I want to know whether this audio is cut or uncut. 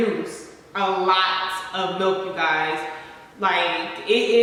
uncut